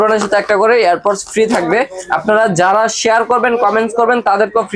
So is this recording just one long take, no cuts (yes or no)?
yes